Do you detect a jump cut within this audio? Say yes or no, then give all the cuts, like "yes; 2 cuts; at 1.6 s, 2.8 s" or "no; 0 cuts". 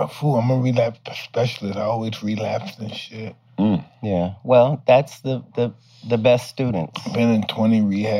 no; 0 cuts